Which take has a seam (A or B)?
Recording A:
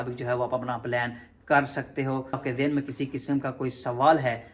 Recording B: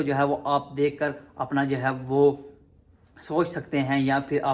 A